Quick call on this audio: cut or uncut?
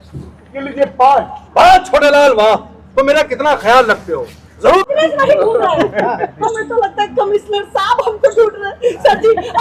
cut